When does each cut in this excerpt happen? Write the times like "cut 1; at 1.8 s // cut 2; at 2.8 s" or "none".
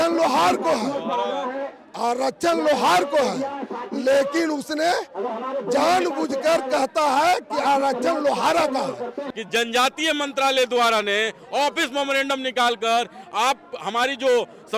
cut 1; at 9.2 s

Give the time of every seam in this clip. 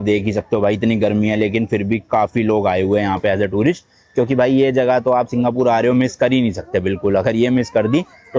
none

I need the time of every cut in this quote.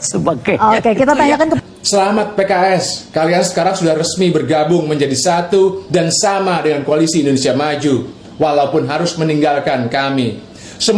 cut 1; at 1.7 s

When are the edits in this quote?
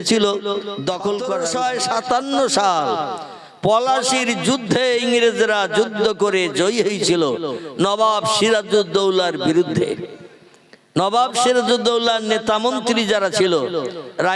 cut 1; at 1.4 s

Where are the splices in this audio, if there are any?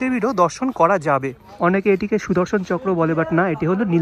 cut 1; at 1.4 s

